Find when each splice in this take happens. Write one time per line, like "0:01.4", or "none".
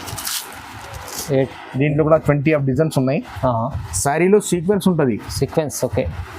0:01.5